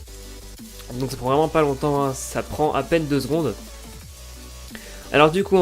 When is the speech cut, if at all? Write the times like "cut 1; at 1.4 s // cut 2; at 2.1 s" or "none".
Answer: cut 1; at 3.5 s